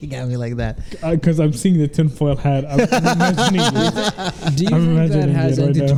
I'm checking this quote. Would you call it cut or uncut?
uncut